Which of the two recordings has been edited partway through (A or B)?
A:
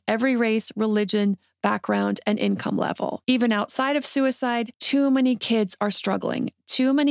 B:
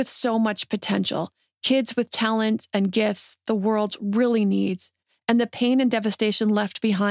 A